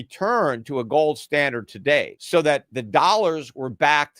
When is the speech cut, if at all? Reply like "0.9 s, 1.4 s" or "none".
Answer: 2.2 s